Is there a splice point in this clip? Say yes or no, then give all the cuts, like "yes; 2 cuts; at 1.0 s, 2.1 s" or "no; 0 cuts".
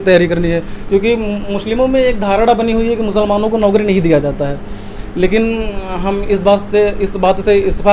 no; 0 cuts